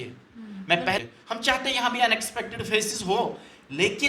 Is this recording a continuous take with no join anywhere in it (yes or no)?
no